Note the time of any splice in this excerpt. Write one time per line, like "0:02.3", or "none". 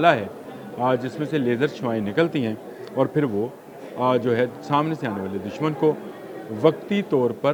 none